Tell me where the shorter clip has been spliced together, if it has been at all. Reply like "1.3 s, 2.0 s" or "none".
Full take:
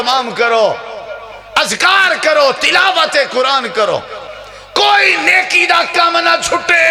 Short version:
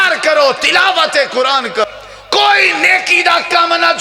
1.9 s